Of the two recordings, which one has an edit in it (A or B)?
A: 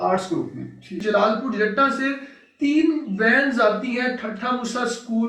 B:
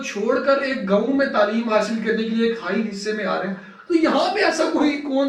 A